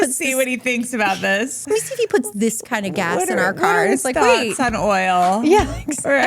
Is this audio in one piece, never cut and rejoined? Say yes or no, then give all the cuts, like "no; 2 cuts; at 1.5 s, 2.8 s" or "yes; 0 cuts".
no; 1 cut; at 1.6 s